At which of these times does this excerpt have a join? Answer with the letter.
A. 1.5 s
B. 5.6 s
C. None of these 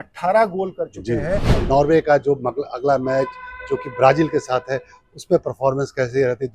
A